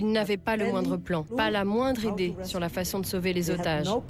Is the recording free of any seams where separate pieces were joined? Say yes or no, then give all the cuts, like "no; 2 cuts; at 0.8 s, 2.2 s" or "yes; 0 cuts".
no; 1 cut; at 1.3 s